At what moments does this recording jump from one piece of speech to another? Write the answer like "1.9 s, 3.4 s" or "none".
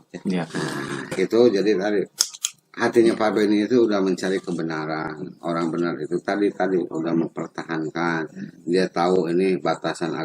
1.2 s